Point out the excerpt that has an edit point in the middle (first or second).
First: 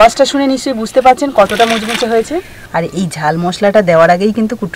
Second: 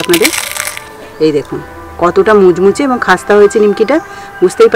first